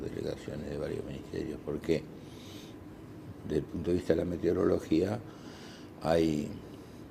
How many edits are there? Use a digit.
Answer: 0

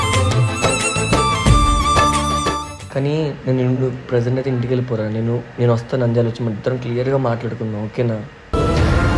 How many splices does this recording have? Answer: 1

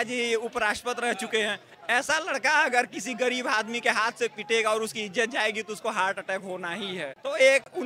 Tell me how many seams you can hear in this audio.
0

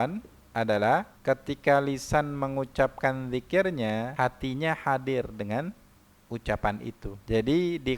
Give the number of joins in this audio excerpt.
3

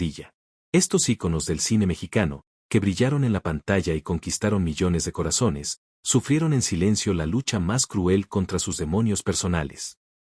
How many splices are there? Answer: 1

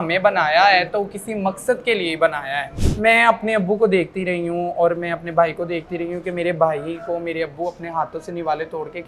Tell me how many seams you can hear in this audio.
1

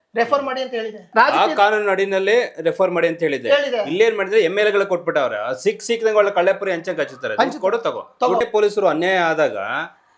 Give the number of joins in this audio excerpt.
2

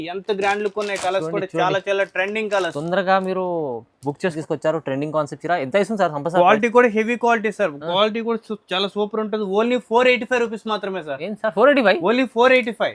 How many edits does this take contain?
1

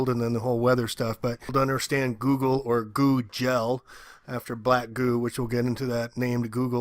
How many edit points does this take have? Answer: 1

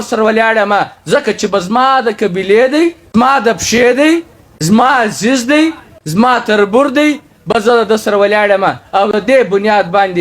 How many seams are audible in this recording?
1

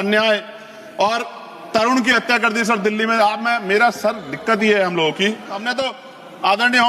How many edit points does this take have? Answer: 1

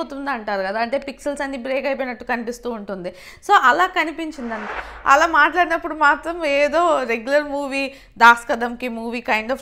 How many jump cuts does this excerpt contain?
1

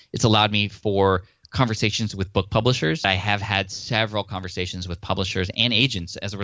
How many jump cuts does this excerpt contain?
1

